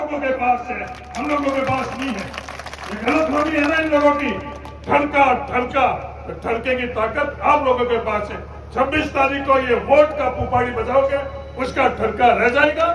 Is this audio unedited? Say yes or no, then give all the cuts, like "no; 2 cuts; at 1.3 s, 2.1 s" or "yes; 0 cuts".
yes; 0 cuts